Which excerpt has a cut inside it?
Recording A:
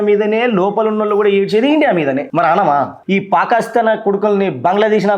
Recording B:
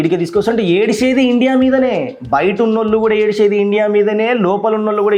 A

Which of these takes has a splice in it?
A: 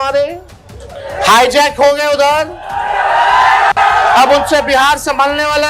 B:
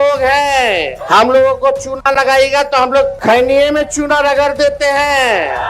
B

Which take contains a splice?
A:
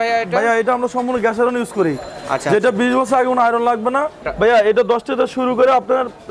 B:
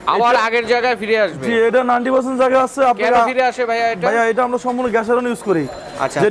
A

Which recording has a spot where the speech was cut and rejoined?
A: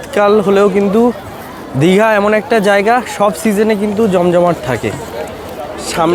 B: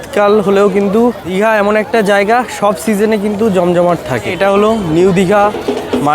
B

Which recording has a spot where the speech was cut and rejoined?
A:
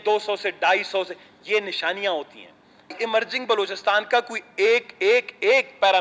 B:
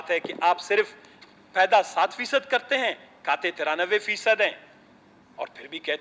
A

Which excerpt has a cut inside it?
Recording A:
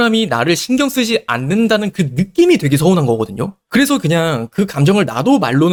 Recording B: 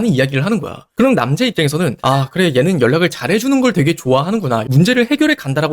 B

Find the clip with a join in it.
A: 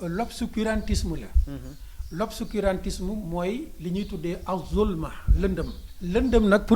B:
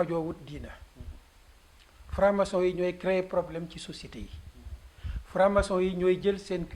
A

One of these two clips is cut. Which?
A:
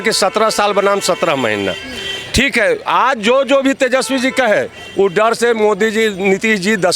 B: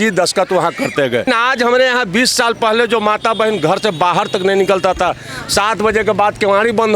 B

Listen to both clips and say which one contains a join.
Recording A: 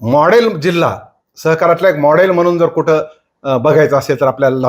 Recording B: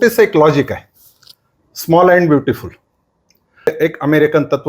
B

